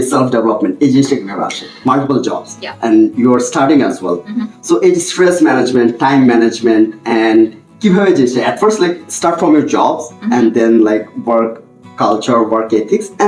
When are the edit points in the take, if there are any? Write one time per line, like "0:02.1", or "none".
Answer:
0:01.7